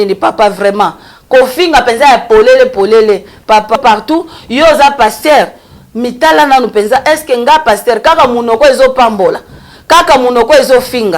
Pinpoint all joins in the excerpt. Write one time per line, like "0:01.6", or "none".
0:03.8